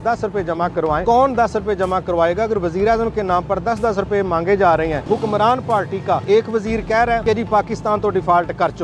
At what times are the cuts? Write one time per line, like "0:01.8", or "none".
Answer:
0:01.0
0:05.0
0:06.2
0:07.2